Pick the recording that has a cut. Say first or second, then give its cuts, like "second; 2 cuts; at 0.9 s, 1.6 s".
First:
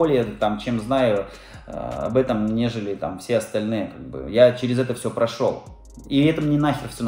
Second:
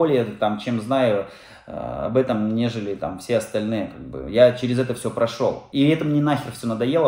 second; 1 cut; at 5.6 s